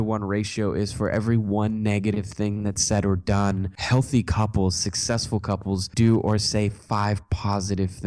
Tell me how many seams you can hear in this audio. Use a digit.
2